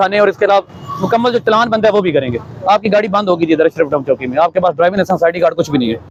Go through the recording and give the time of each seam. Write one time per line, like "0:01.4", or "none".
none